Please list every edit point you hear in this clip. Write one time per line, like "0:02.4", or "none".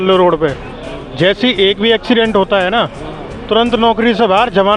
none